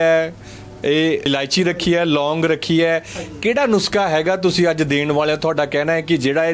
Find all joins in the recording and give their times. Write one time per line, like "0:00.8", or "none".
0:01.3